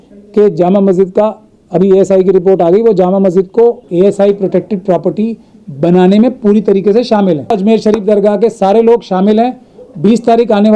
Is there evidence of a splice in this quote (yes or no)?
yes